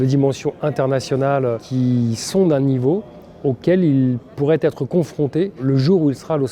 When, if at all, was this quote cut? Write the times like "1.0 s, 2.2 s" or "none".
1.6 s, 5.6 s

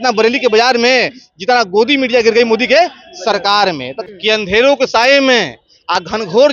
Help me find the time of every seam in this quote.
3.9 s

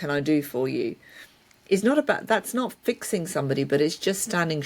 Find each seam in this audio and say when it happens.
none

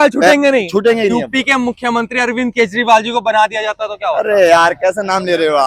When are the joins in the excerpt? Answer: 1.2 s

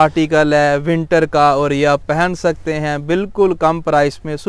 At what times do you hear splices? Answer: none

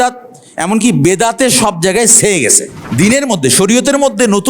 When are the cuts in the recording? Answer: 2.7 s

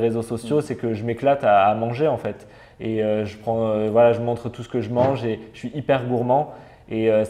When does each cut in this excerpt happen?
none

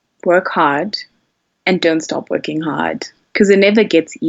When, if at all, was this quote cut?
none

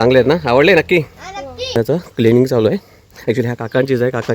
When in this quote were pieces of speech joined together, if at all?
2.0 s

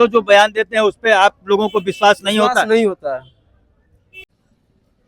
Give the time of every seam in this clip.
4.1 s

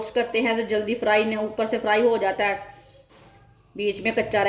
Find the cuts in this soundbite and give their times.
none

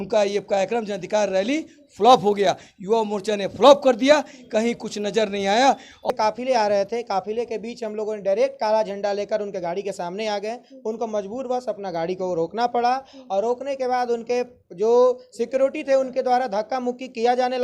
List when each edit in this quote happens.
6.1 s

